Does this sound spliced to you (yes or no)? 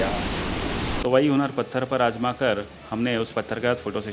yes